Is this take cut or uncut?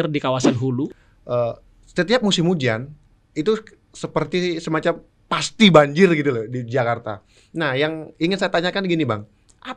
cut